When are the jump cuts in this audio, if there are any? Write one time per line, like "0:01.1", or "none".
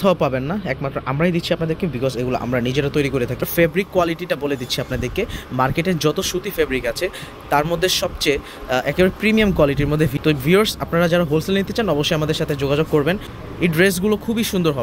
0:03.5
0:10.1
0:13.3